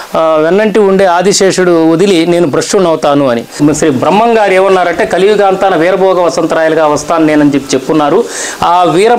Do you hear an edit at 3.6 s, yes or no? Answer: yes